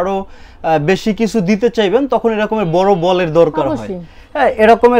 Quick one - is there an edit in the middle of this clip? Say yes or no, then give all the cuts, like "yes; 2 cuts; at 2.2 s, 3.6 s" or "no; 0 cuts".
no; 0 cuts